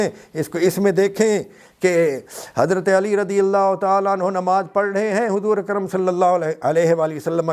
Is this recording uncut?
yes; 0 cuts

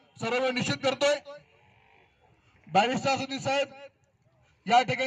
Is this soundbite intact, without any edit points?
yes; 0 cuts

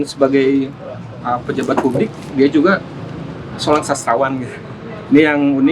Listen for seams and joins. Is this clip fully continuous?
yes; 0 cuts

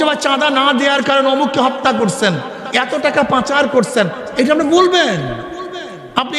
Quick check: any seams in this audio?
no; 0 cuts

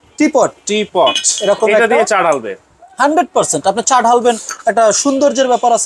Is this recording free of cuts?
yes; 0 cuts

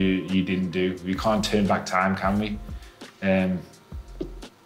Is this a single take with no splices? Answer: yes; 0 cuts

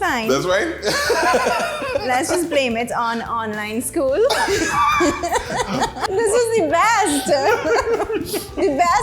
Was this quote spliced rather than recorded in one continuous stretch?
yes; 1 cut; at 6.0 s

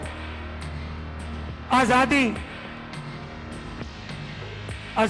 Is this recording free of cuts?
no; 2 cuts; at 2.4 s, 4.2 s

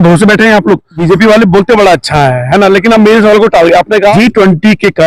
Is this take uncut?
no; 2 cuts; at 1.0 s, 4.1 s

